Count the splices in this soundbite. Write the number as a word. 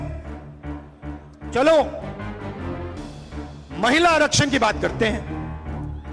one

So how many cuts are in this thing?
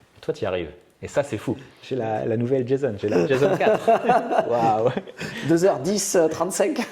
one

